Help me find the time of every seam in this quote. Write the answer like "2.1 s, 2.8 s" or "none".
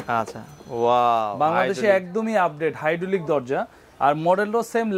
none